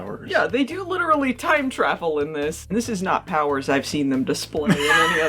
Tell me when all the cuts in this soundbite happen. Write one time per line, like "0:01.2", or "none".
0:02.7